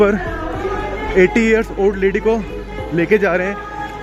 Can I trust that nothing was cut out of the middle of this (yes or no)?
yes